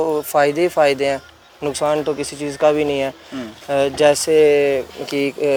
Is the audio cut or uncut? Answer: uncut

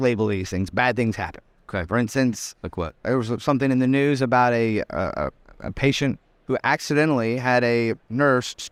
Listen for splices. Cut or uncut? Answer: uncut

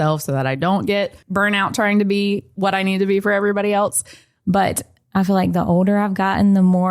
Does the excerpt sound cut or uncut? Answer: cut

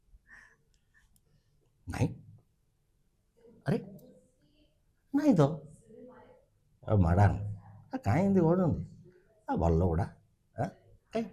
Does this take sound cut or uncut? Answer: uncut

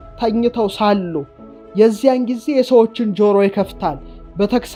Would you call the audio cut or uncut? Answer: uncut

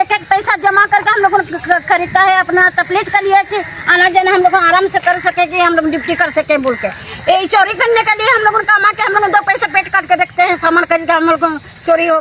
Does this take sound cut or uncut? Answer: uncut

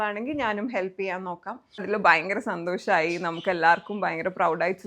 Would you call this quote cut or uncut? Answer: cut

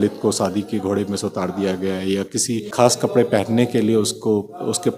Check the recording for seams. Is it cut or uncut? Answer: cut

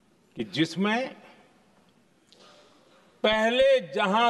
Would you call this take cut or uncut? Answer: uncut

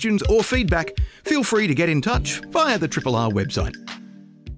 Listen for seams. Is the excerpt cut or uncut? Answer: cut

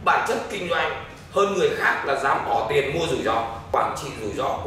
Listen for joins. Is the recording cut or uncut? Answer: cut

